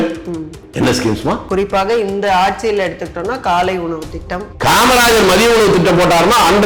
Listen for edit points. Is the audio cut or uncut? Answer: cut